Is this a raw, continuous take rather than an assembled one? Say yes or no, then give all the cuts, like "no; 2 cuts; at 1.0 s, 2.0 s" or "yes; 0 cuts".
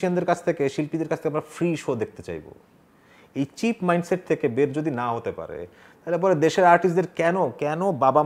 yes; 0 cuts